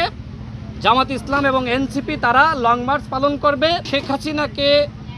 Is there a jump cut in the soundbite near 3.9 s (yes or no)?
yes